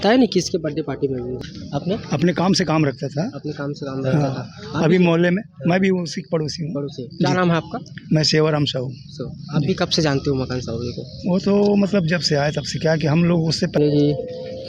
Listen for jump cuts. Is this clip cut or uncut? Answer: cut